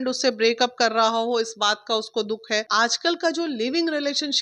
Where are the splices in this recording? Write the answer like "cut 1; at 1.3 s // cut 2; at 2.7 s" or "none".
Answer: cut 1; at 2.7 s